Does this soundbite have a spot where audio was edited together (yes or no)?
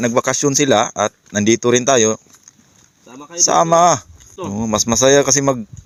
no